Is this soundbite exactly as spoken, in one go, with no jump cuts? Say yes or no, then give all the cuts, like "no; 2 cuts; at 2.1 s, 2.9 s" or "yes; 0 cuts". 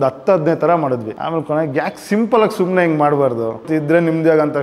no; 2 cuts; at 1.1 s, 3.7 s